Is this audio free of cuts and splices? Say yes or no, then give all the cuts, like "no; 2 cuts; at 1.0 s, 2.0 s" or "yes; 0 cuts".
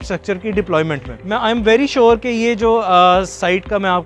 no; 1 cut; at 1.1 s